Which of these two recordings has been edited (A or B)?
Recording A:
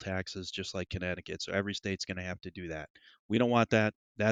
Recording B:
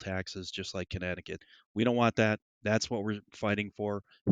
B